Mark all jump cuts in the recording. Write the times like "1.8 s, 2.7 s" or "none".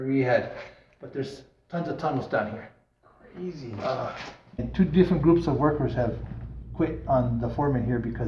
4.7 s